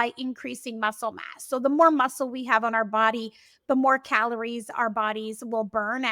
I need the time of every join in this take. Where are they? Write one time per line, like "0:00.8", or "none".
none